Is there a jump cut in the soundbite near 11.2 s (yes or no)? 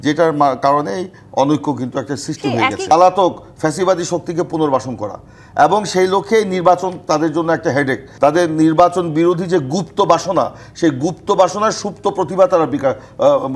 no